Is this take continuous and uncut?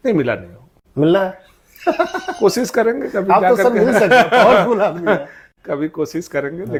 yes; 0 cuts

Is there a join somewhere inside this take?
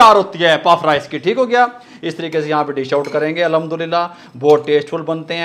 no; 0 cuts

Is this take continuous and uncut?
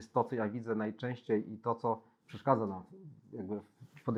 yes; 0 cuts

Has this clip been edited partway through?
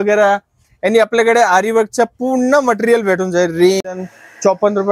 yes; 1 cut; at 3.8 s

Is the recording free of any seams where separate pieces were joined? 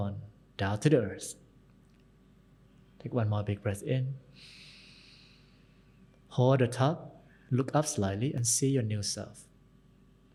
yes; 0 cuts

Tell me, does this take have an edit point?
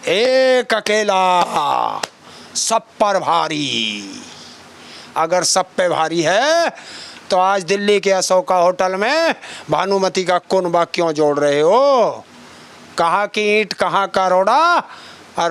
no; 0 cuts

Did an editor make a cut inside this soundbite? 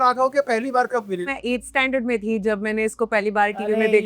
yes; 1 cut; at 1.2 s

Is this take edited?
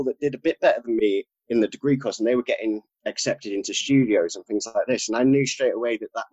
yes; 1 cut; at 2.9 s

